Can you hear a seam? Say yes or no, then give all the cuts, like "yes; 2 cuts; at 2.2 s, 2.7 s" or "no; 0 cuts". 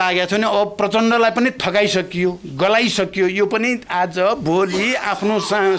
no; 0 cuts